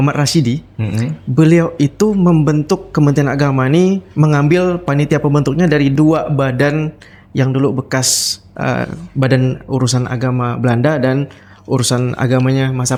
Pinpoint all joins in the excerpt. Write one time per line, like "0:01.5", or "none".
none